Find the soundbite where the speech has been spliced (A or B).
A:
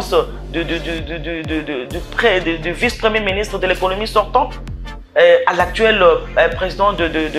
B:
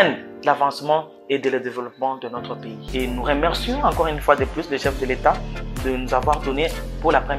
B